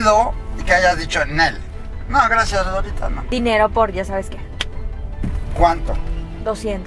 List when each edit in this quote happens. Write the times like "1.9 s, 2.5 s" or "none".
3.3 s

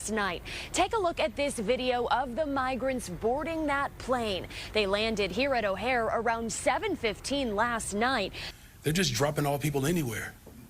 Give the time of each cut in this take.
8.4 s

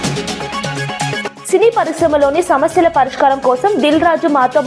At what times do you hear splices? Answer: 1.3 s

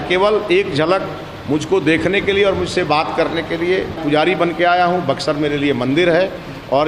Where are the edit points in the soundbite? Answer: 4.0 s

